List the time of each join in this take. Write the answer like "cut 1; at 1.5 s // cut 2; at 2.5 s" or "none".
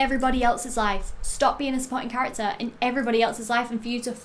none